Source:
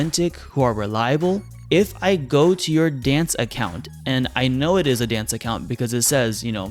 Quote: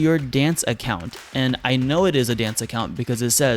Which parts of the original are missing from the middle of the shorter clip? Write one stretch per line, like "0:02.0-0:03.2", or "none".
none